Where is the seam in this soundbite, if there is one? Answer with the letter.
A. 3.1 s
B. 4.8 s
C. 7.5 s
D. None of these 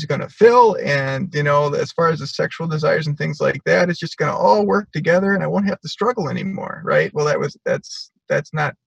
D